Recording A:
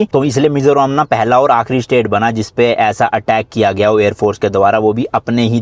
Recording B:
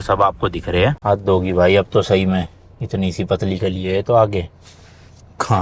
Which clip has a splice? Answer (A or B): B